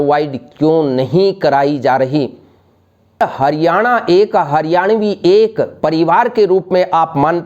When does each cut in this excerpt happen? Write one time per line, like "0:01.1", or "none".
0:03.2